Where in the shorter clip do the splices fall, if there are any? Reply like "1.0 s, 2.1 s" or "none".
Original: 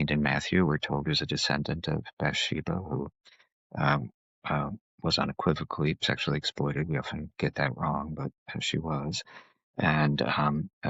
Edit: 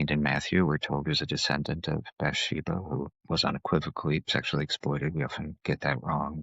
3.2 s